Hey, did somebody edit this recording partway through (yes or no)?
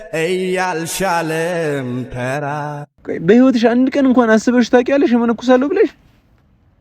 yes